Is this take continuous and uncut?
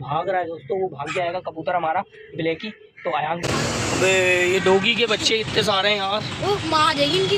no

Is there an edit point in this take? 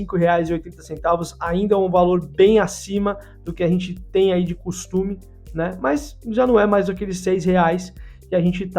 no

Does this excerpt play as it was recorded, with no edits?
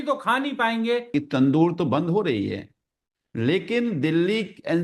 no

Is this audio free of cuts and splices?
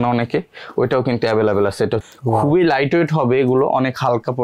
no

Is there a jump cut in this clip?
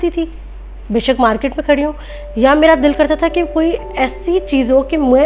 no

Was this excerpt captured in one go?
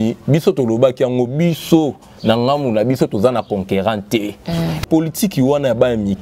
no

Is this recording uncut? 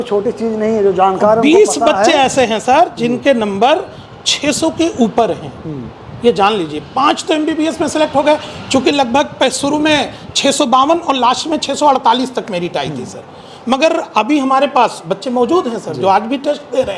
yes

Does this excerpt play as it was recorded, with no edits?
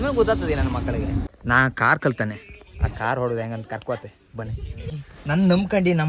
no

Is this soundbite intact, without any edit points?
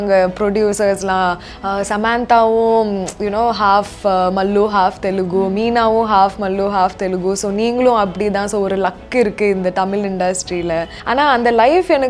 no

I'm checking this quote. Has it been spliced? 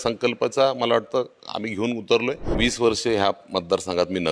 yes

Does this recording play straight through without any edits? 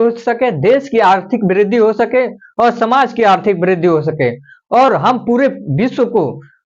yes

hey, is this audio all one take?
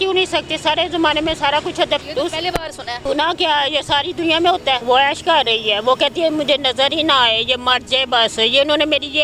no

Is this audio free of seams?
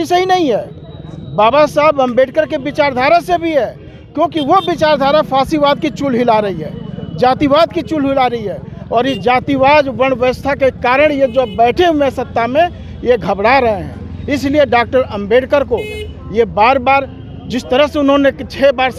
yes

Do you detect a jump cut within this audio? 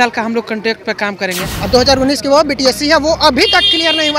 yes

